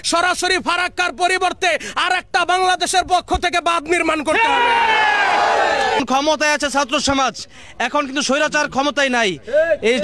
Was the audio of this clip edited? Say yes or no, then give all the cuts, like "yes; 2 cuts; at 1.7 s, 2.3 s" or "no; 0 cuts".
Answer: yes; 1 cut; at 6.0 s